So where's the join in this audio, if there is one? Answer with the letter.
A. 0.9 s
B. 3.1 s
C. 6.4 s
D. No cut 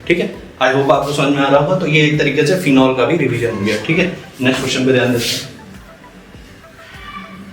D